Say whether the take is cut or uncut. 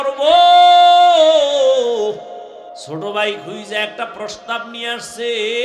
cut